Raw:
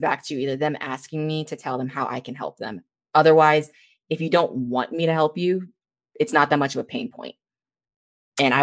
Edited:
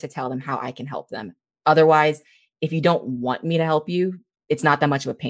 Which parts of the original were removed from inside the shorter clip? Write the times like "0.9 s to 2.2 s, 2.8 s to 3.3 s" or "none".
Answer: 5.8 s to 6.0 s

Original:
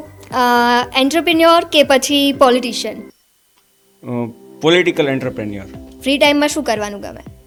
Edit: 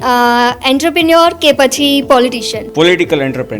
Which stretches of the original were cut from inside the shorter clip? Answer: 2.9 s to 4.4 s

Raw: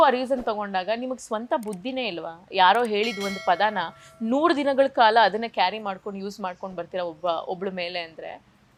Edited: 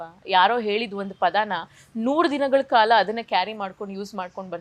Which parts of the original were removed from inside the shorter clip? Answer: none

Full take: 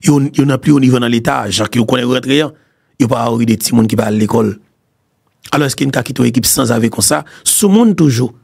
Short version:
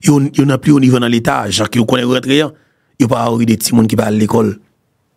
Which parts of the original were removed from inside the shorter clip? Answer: none

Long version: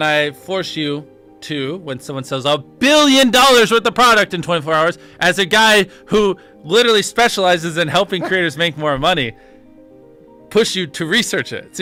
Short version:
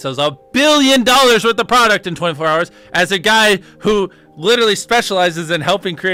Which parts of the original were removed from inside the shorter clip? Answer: none

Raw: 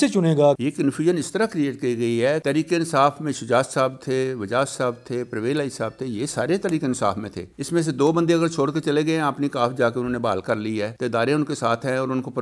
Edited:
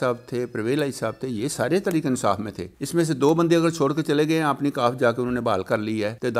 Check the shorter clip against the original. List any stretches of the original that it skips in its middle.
none

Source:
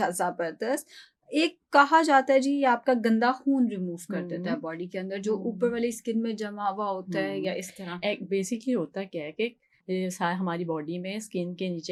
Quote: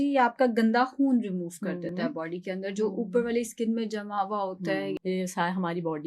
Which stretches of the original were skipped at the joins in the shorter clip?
7.4 s to 9.8 s

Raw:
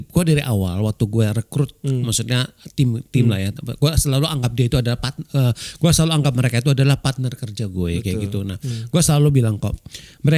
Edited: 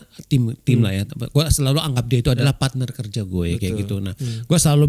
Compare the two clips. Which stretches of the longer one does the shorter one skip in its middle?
4.9 s to 6.9 s

